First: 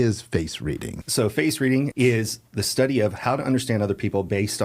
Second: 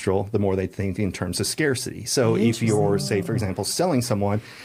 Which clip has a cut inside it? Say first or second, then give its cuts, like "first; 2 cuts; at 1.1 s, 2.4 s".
first; 2 cuts; at 1.0 s, 1.9 s